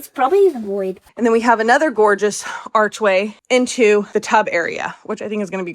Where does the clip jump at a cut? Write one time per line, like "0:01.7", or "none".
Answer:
0:01.0
0:03.4
0:04.1